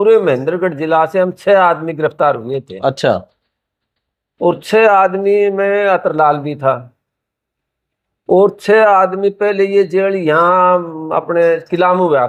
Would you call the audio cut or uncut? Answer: uncut